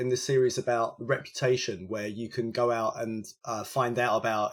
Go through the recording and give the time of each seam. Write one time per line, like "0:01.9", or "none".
none

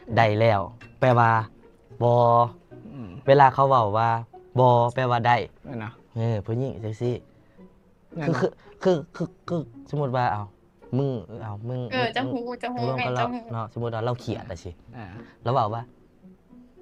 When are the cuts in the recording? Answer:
none

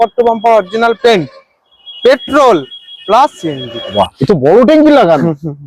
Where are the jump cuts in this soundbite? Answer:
0:03.9

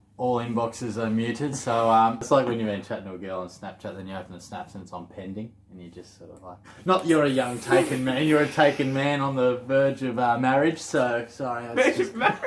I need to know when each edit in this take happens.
0:02.2

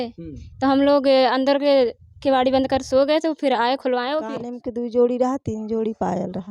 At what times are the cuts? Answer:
0:04.3

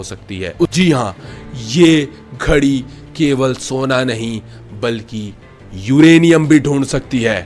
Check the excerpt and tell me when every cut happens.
none

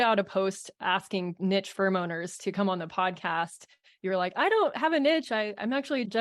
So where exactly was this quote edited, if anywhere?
0:01.3

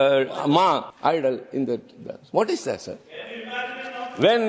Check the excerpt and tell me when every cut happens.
0:00.9

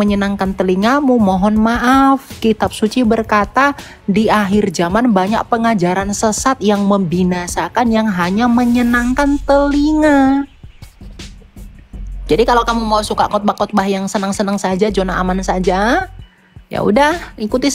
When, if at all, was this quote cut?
none

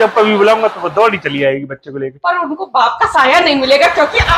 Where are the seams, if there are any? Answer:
none

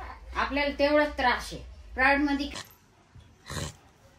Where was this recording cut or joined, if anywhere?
0:02.5

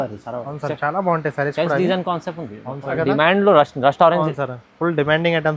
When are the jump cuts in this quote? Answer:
0:03.0

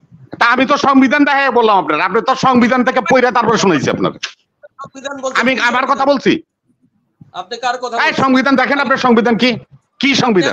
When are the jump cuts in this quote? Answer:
none

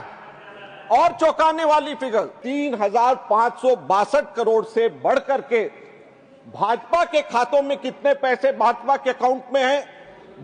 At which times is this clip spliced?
0:02.4

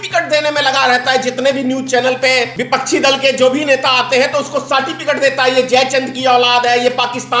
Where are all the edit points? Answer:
0:02.6

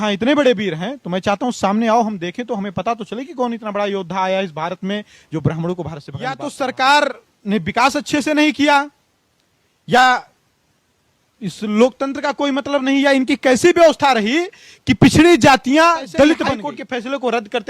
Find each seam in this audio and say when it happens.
0:06.4
0:16.4

